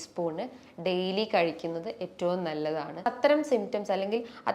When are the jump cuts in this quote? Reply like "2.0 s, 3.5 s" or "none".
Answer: 3.1 s